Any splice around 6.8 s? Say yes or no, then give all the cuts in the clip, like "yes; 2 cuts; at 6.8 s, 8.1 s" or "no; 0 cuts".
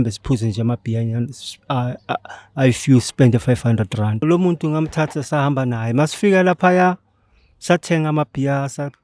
no; 1 cut; at 4.2 s